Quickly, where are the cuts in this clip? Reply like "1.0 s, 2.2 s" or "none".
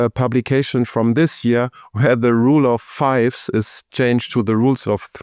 none